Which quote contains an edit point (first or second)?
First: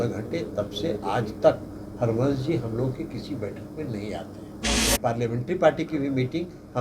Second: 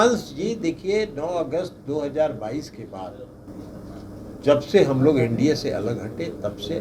first